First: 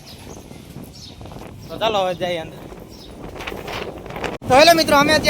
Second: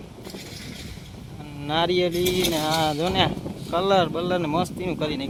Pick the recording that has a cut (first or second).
first